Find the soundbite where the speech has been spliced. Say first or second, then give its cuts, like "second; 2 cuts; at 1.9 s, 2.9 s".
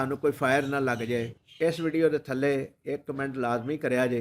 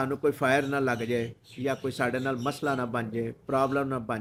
first; 1 cut; at 1.4 s